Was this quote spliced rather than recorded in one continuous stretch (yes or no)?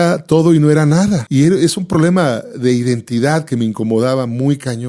yes